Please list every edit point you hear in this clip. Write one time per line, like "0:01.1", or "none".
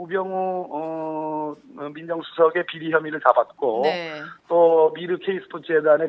none